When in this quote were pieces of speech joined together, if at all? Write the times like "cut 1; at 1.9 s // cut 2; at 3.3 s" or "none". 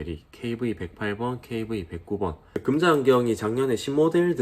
cut 1; at 2.4 s